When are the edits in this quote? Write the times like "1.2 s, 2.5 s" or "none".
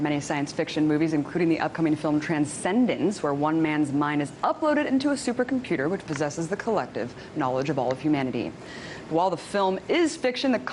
5.8 s